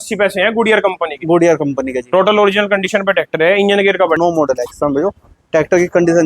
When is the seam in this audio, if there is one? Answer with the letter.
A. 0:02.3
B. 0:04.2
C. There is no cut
B